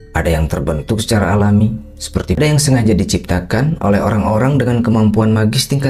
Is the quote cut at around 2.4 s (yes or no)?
yes